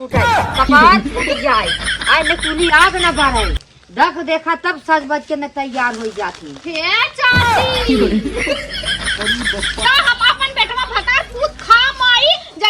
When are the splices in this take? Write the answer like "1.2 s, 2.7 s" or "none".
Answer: 9.8 s

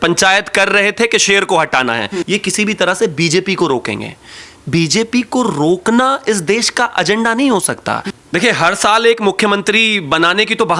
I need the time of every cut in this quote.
2.2 s, 8.0 s

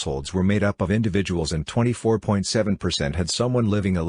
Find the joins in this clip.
1.8 s, 3.1 s

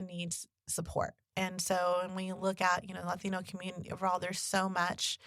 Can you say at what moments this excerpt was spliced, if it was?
1.2 s

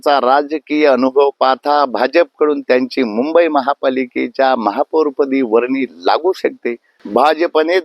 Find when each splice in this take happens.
6.9 s

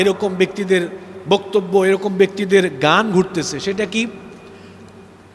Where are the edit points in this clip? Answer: none

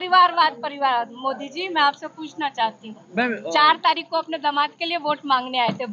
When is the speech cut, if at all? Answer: none

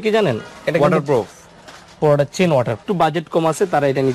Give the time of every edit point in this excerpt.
2.8 s

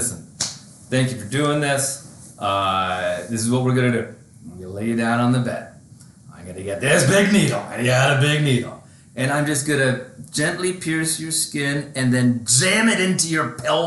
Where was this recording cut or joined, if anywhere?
none

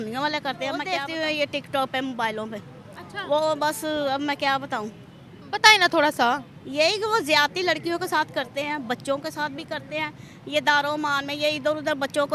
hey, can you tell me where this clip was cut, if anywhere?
0.9 s

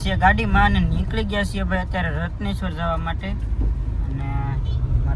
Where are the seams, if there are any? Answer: none

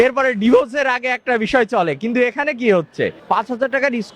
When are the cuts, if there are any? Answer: 3.2 s

